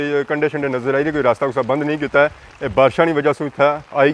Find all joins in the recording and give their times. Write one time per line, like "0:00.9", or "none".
none